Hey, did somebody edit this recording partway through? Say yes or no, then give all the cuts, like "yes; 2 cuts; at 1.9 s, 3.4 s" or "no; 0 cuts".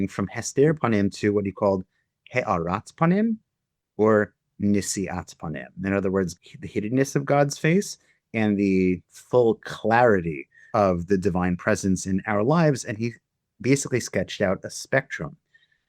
yes; 1 cut; at 6.3 s